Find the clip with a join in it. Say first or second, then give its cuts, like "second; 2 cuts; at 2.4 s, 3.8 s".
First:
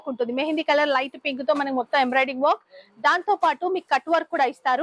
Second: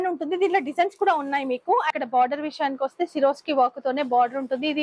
second; 1 cut; at 1.9 s